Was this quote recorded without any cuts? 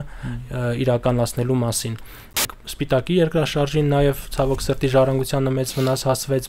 no; 1 cut; at 2.4 s

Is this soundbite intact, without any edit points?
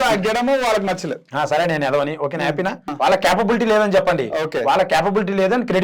no; 1 cut; at 2.9 s

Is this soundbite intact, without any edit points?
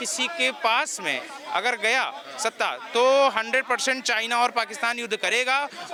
yes; 0 cuts

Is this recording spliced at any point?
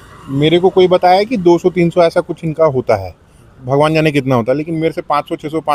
no; 0 cuts

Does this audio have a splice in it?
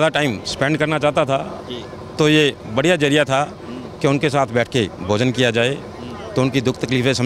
no; 0 cuts

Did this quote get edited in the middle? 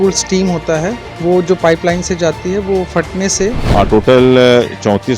yes; 2 cuts; at 1.1 s, 3.6 s

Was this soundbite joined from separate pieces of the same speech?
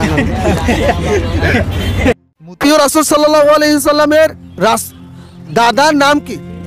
yes; 1 cut; at 2.6 s

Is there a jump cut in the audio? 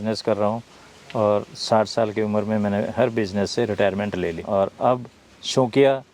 yes; 1 cut; at 4.4 s

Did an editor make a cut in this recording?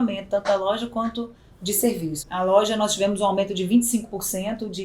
yes; 1 cut; at 2.2 s

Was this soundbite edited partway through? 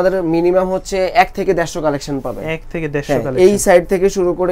no; 0 cuts

